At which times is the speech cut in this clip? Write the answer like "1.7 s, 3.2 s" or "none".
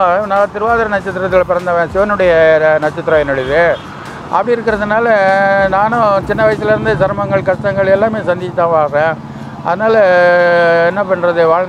none